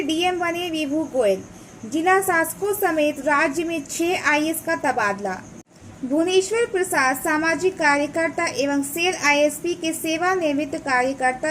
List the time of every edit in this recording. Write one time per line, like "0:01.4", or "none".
0:05.6